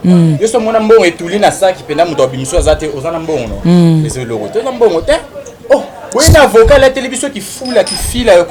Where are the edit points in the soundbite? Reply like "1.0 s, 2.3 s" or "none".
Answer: none